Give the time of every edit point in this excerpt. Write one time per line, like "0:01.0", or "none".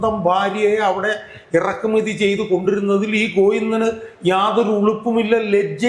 none